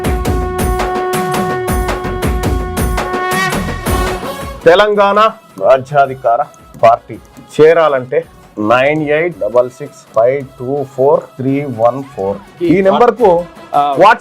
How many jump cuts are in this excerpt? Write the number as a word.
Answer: one